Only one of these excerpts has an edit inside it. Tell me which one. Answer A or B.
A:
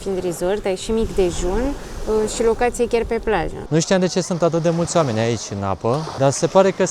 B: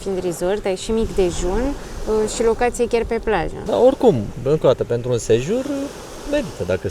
A